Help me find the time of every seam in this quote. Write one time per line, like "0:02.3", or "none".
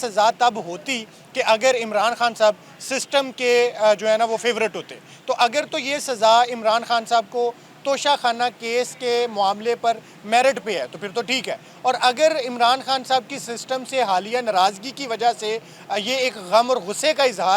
none